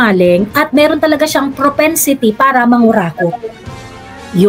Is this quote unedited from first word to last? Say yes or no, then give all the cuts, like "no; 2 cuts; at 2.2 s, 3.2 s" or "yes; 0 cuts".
yes; 0 cuts